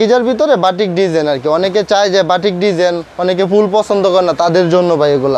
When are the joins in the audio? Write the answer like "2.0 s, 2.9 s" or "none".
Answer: none

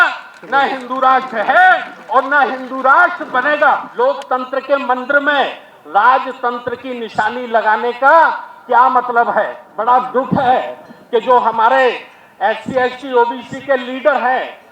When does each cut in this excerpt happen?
3.9 s, 9.6 s

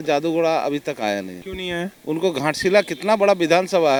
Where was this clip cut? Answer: none

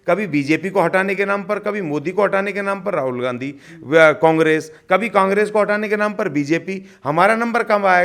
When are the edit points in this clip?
none

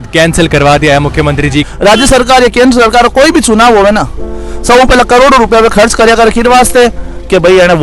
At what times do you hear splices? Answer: 1.7 s

